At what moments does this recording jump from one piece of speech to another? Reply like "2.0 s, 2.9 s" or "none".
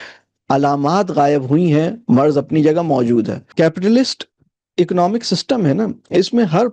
3.4 s